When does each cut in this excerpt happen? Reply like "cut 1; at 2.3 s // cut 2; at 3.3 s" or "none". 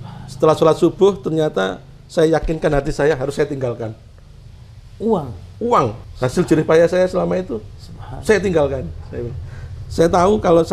cut 1; at 6.0 s